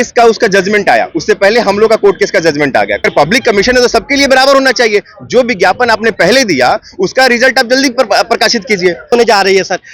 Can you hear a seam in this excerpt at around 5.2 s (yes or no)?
no